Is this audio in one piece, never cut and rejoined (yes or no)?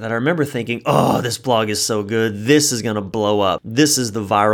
no